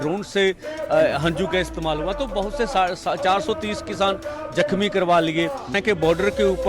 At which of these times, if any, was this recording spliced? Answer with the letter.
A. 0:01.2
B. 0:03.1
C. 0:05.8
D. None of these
C